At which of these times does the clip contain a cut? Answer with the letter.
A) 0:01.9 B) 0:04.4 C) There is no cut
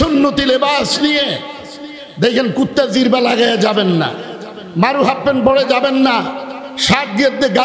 C